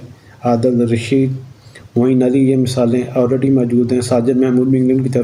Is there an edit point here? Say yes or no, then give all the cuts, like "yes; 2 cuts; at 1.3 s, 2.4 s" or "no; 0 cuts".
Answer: no; 0 cuts